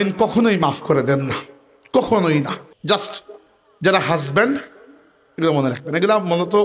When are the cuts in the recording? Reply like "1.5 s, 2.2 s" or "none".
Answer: 2.7 s